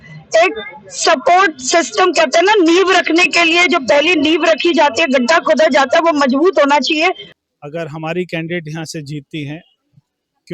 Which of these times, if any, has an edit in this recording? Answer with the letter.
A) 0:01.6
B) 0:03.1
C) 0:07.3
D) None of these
C